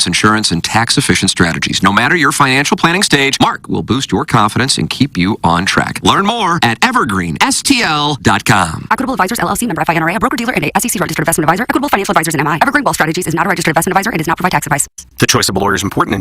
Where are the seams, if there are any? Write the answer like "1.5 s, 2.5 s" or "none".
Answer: 15.0 s